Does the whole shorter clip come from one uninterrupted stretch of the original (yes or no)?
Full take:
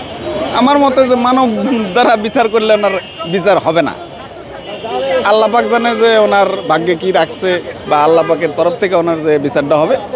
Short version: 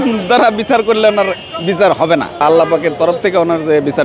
no